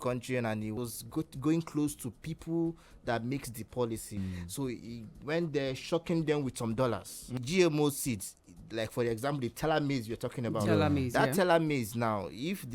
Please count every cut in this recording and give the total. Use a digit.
3